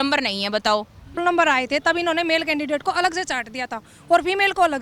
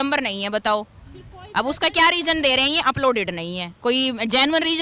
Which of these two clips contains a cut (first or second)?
first